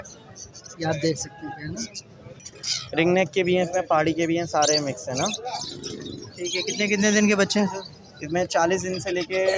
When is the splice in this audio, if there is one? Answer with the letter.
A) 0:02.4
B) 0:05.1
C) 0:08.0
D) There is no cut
A